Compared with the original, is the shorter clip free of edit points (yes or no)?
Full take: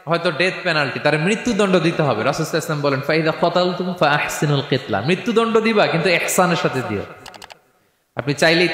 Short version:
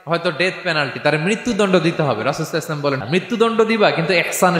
no